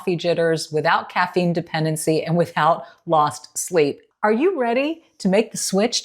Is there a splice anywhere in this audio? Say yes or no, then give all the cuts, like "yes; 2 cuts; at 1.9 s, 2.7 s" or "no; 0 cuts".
yes; 1 cut; at 4.0 s